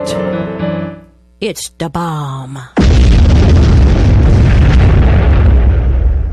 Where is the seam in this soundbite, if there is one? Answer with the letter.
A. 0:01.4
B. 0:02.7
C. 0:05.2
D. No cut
D